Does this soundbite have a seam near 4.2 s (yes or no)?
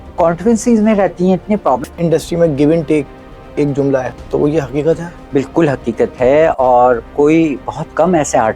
yes